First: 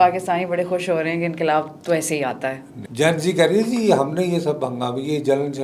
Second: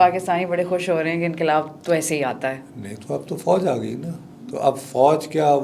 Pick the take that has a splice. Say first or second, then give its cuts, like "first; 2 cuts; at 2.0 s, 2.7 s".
first; 1 cut; at 2.8 s